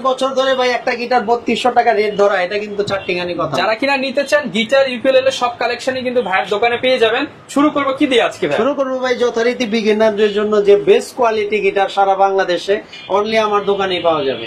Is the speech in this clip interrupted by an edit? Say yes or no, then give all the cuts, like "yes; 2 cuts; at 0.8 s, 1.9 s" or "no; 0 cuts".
no; 0 cuts